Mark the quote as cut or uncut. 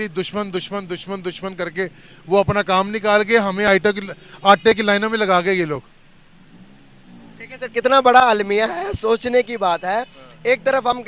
uncut